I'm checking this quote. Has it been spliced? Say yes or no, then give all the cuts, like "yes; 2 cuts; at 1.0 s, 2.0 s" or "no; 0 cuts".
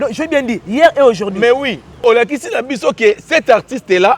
yes; 1 cut; at 2.0 s